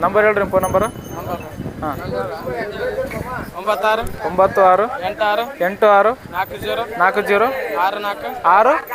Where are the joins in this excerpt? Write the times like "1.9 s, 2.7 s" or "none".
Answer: none